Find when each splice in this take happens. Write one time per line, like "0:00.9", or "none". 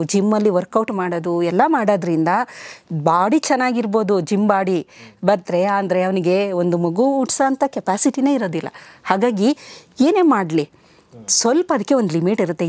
none